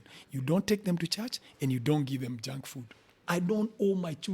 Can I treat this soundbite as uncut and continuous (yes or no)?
no